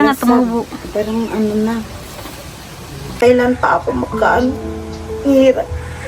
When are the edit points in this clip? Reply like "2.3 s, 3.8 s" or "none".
3.1 s